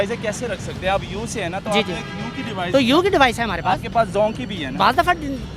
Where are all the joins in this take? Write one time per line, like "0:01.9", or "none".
none